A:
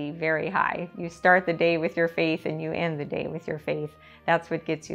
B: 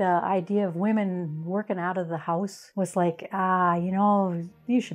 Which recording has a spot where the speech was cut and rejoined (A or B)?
B